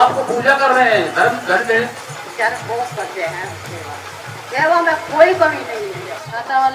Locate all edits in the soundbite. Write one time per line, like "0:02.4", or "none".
0:01.9
0:05.7